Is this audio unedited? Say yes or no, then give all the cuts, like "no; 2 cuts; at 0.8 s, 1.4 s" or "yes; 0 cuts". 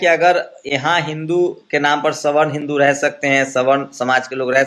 yes; 0 cuts